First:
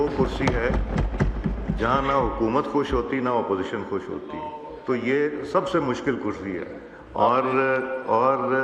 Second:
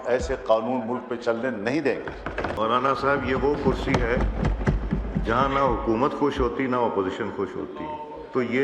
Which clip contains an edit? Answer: second; 1 cut; at 2.5 s

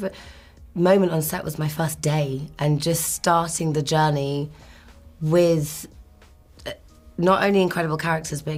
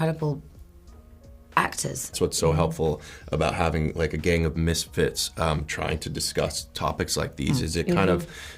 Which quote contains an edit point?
second; 1 cut; at 2.1 s

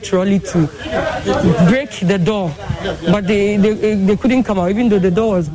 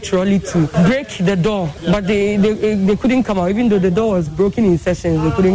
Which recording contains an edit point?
second; 2 cuts; at 0.7 s, 1.8 s

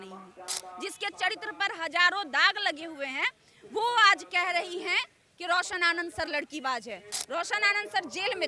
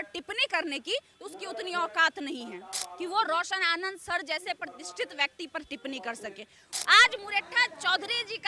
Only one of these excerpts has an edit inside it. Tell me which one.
second; 1 cut; at 6.7 s

